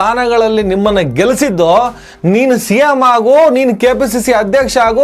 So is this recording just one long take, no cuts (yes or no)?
yes